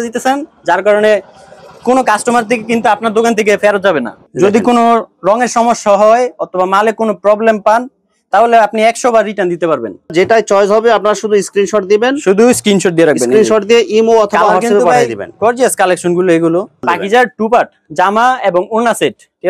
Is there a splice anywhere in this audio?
yes; 3 cuts; at 4.2 s, 10.1 s, 16.9 s

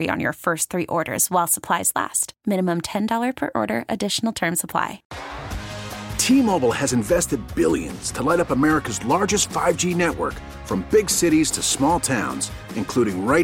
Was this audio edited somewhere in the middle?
yes; 1 cut; at 5.1 s

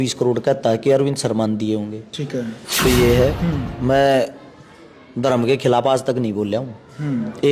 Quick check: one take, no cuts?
no; 1 cut; at 2.9 s

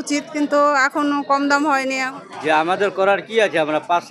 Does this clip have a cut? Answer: yes; 1 cut; at 2.1 s

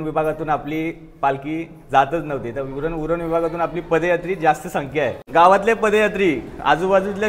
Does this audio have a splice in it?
yes; 1 cut; at 5.2 s

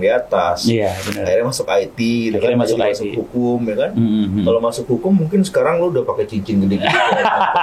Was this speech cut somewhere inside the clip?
no; 0 cuts

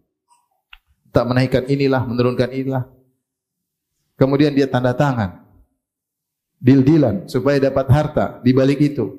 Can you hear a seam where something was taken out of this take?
no; 0 cuts

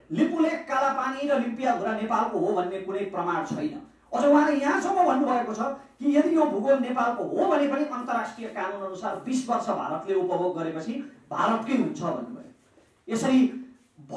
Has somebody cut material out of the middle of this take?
no; 0 cuts

